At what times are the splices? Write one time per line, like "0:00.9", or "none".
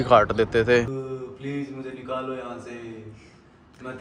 0:00.9